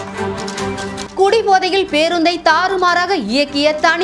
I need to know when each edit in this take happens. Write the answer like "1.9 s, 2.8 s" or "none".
1.0 s